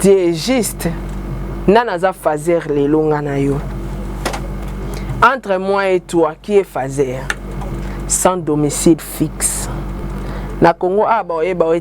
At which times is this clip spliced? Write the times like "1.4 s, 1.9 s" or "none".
4.6 s, 7.7 s, 10.0 s